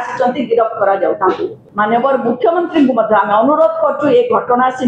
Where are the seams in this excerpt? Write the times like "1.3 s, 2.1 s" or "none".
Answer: 1.6 s